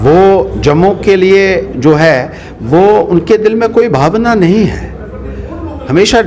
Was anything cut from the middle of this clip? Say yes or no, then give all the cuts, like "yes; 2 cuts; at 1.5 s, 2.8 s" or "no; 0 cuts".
no; 0 cuts